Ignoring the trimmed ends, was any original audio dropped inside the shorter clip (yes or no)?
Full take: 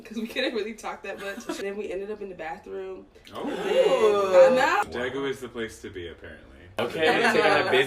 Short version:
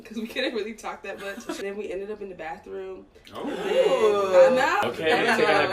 yes